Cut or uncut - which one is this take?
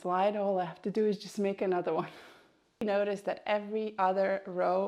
cut